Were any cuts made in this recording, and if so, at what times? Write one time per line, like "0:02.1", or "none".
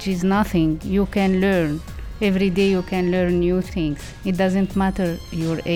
0:03.7

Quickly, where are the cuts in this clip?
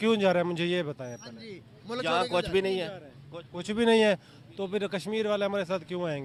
none

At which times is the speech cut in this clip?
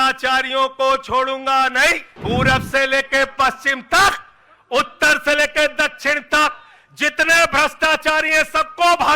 0:02.1

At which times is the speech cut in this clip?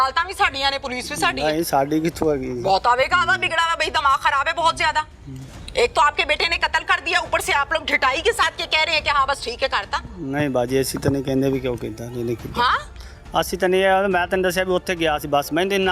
none

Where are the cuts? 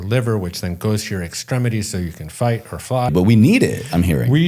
0:03.1

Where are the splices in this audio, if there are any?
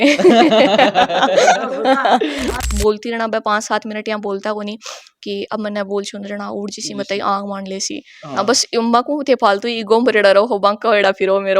0:02.5

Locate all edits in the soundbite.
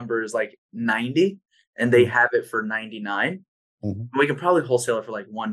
none

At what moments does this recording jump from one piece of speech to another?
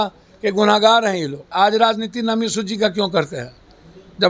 0:01.5

